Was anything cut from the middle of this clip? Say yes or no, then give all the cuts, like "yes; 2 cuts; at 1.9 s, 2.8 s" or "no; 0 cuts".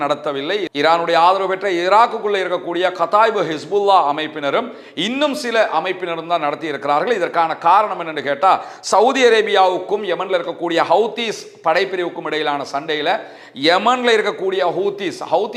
no; 0 cuts